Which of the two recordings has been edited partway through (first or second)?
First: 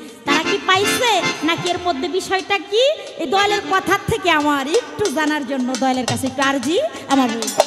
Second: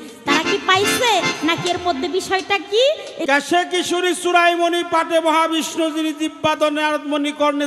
second